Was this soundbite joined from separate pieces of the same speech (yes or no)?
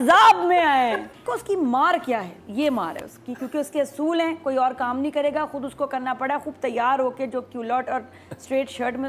yes